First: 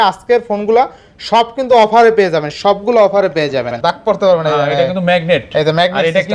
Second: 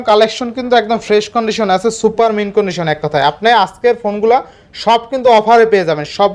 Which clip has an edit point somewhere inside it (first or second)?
first